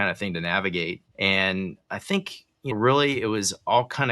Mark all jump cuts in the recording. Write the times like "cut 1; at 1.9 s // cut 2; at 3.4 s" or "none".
cut 1; at 1.0 s // cut 2; at 2.7 s